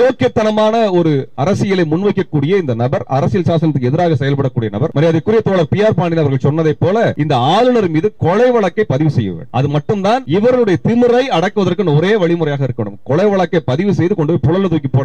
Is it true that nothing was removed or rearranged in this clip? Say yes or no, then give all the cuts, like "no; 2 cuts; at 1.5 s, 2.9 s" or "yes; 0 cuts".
no; 4 cuts; at 4.9 s, 7.2 s, 9.4 s, 10.2 s